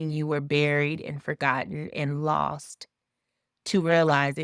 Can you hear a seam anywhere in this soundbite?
no; 0 cuts

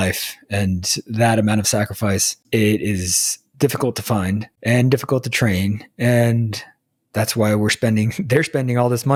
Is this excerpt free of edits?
yes; 0 cuts

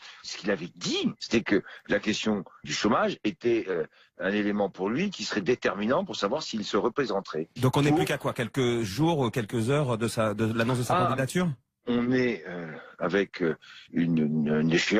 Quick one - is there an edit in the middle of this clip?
no; 0 cuts

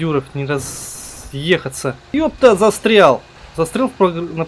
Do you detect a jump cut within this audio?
yes; 2 cuts; at 2.1 s, 3.4 s

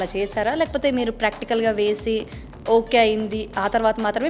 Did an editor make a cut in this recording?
no; 0 cuts

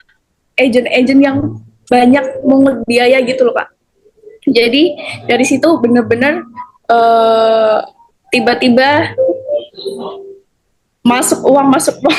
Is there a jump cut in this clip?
no; 0 cuts

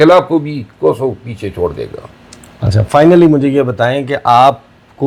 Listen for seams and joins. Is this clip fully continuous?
yes; 0 cuts

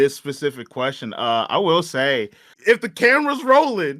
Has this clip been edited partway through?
yes; 1 cut; at 2.5 s

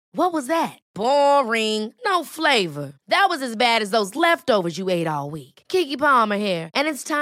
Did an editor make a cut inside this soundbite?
no; 0 cuts

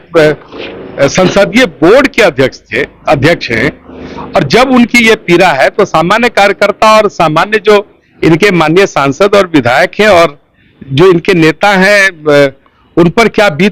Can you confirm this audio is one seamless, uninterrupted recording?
yes; 0 cuts

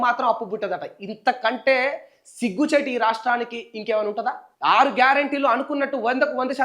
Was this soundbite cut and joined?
yes; 1 cut; at 4.4 s

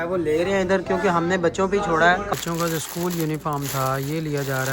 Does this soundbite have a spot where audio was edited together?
yes; 1 cut; at 2.3 s

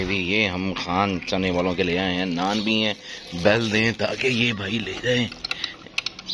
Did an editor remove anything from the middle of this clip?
no; 0 cuts

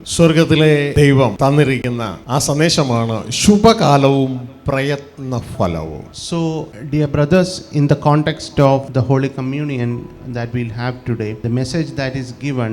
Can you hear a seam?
yes; 6 cuts; at 1.1 s, 2.2 s, 6.1 s, 6.8 s, 8.9 s, 11.4 s

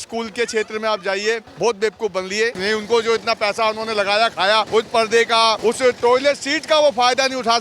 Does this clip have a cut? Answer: yes; 4 cuts; at 1.5 s, 2.6 s, 4.7 s, 5.6 s

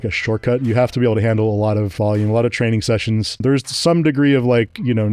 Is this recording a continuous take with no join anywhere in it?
no; 2 cuts; at 1.9 s, 3.4 s

